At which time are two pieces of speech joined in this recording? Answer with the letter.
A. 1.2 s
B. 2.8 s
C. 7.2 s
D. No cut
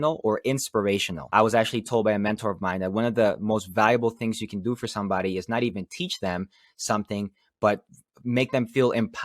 A